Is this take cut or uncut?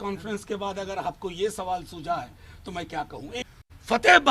cut